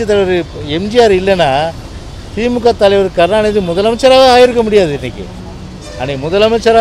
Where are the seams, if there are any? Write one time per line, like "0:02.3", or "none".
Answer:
none

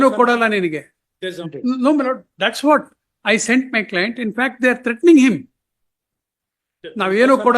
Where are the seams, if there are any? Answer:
0:01.5

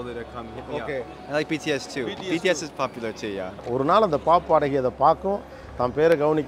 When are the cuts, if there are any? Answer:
0:01.2
0:03.6

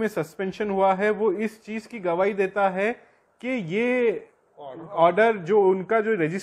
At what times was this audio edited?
none

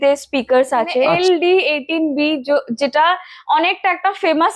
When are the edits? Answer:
0:01.1

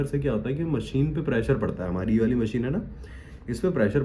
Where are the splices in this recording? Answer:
none

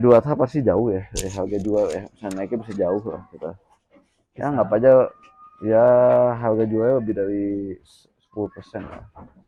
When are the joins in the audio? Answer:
none

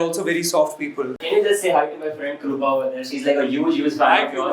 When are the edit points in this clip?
0:01.1

